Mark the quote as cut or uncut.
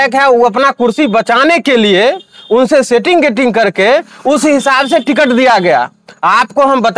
uncut